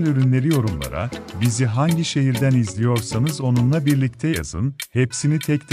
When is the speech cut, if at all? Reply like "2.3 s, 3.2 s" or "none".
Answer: none